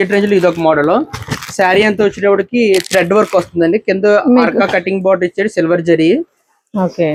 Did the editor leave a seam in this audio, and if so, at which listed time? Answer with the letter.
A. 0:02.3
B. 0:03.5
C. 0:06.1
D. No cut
D